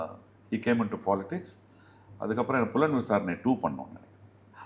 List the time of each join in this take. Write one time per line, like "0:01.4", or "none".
none

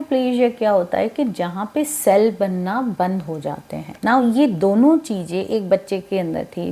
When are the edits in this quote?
0:03.8

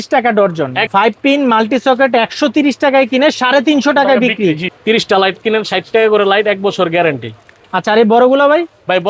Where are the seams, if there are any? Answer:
0:00.8
0:04.7
0:07.5

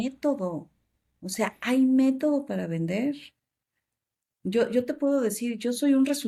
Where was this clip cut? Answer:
none

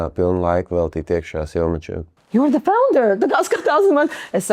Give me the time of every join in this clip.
0:02.1

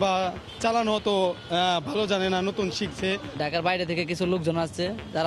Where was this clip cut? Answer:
0:03.3

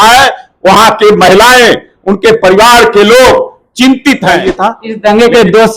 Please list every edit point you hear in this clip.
0:04.3

